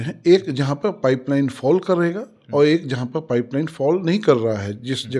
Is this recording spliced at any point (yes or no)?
no